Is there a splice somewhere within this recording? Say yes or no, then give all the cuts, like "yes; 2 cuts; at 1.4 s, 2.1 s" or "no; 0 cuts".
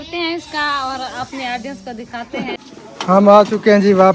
yes; 1 cut; at 2.6 s